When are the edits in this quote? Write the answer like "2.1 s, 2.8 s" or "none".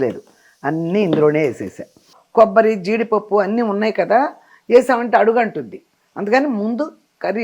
2.2 s